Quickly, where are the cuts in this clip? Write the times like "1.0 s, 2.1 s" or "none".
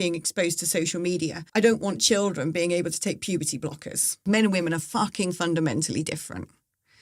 1.4 s, 4.2 s

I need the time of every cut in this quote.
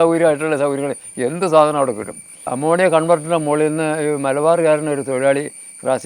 2.5 s

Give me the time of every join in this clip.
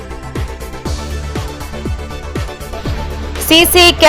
1.0 s, 3.0 s

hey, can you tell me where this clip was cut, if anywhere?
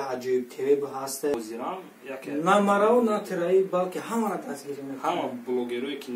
1.3 s

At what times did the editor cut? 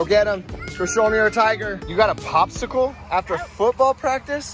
1.9 s

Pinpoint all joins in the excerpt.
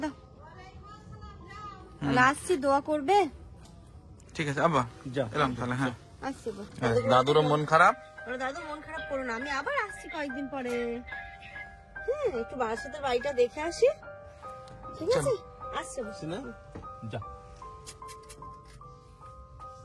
none

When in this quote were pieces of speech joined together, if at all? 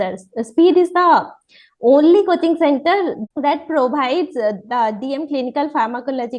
3.3 s

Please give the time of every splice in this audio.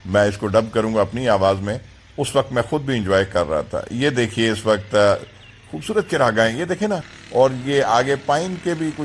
7.1 s

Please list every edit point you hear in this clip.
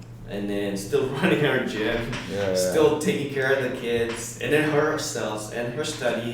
none

